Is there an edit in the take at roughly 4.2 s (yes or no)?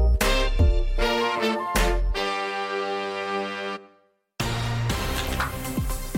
yes